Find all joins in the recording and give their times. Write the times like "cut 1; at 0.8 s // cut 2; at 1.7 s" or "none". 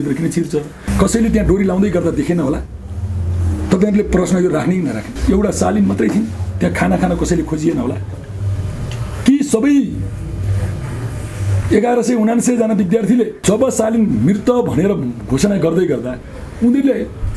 cut 1; at 0.9 s // cut 2; at 5.1 s // cut 3; at 13.4 s